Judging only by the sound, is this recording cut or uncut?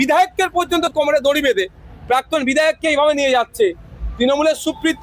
uncut